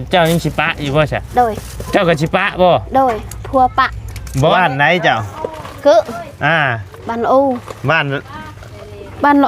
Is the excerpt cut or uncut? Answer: cut